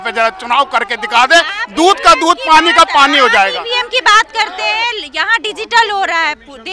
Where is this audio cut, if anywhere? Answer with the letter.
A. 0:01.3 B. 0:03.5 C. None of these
C